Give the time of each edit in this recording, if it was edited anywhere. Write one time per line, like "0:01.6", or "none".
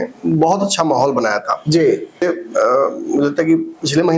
0:02.2